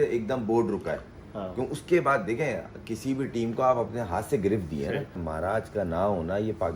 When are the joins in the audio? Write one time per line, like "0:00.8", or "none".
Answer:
0:05.2

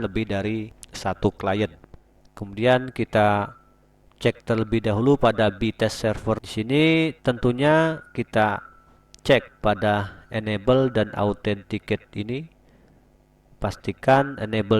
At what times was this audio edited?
0:01.9
0:06.5

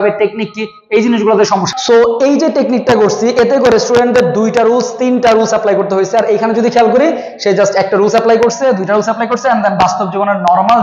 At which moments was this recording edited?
0:01.7

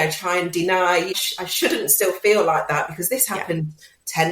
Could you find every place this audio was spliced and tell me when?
0:01.2

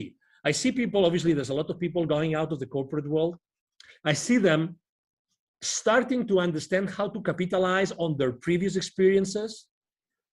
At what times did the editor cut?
none

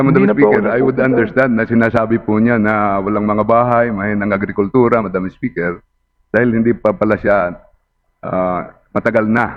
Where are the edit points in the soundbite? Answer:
none

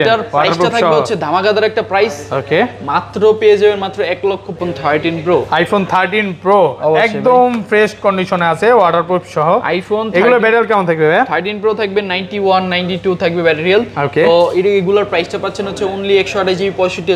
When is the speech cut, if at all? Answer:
0:04.6

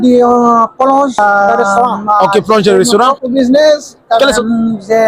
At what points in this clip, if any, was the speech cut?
0:03.1

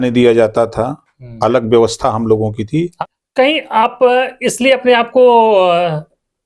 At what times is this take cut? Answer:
0:02.9

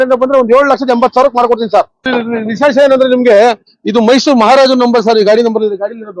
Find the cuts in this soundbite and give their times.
0:02.0

